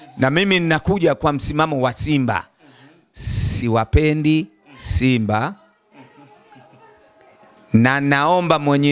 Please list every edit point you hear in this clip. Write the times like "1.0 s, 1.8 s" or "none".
none

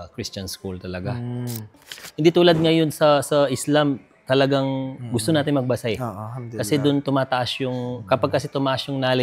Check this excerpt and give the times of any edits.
1.9 s

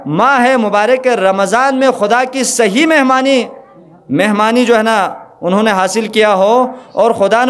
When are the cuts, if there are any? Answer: none

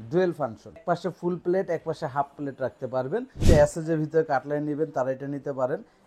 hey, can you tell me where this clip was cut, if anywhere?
0.8 s, 3.4 s

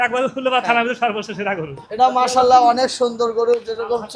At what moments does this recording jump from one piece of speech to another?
1.8 s

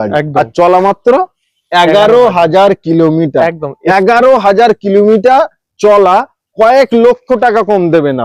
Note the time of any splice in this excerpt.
none

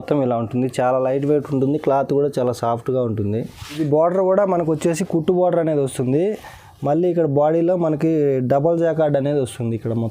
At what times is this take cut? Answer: 3.8 s

